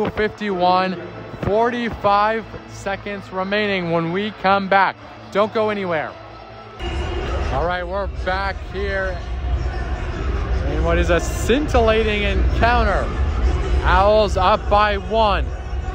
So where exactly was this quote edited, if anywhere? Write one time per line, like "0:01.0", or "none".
0:06.8